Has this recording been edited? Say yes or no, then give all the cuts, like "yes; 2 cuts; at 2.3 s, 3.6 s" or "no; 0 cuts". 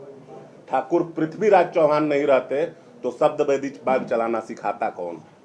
no; 0 cuts